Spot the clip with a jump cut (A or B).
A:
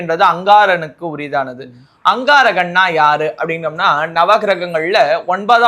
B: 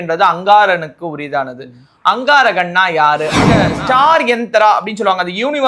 B